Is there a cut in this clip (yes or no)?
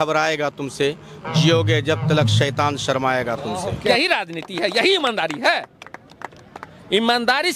yes